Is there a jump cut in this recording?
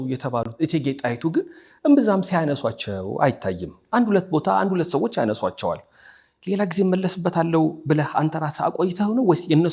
no; 0 cuts

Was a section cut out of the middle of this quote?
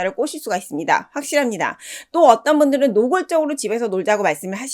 no; 0 cuts

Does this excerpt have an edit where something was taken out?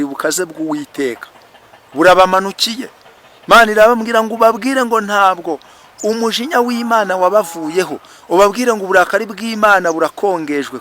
no; 0 cuts

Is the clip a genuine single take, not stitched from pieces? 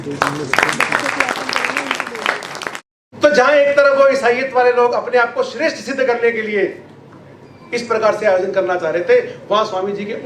no; 1 cut; at 2.9 s

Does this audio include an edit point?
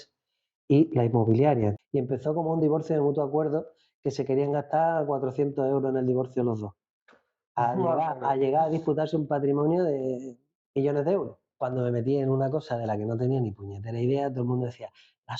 yes; 2 cuts; at 1.8 s, 11.4 s

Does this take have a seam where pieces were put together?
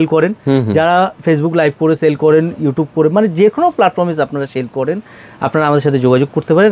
no; 0 cuts

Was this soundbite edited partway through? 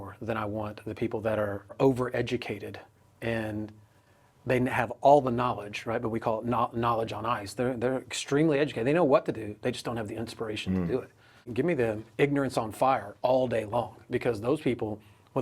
yes; 2 cuts; at 1.7 s, 11.5 s

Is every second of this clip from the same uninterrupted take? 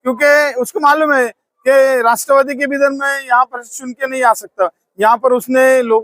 yes; 0 cuts

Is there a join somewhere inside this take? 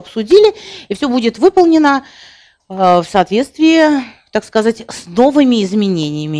no; 0 cuts

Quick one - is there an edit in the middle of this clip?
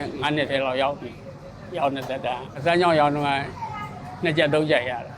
yes; 1 cut; at 2.6 s

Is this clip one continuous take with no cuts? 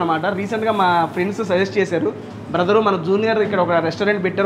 yes; 0 cuts

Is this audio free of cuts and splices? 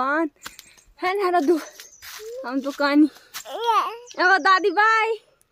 yes; 0 cuts

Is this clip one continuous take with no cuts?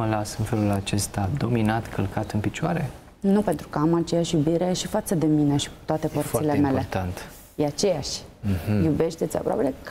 yes; 0 cuts

